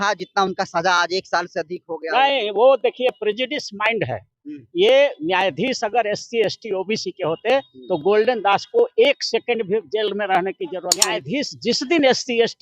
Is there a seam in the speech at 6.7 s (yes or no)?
no